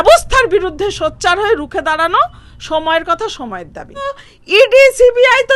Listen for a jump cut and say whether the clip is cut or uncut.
cut